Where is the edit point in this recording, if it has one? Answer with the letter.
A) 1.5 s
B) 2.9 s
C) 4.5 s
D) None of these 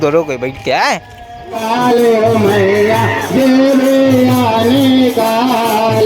A